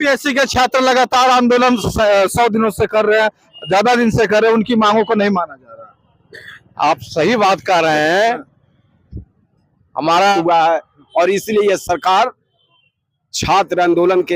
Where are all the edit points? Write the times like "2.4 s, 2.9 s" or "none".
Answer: 10.4 s